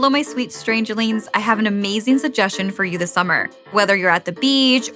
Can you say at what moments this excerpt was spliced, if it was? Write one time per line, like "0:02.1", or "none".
0:03.7